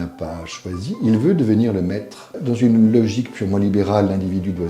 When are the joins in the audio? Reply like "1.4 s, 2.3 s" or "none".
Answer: 2.4 s